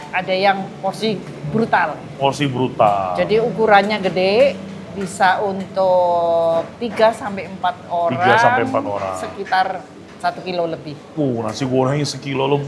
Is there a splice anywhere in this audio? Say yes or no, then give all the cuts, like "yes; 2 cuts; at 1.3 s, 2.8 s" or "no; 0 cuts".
no; 0 cuts